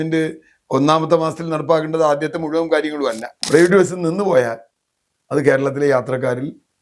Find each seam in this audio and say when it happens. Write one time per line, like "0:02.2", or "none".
0:03.4